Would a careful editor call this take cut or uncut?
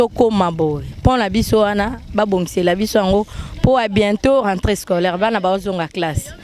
uncut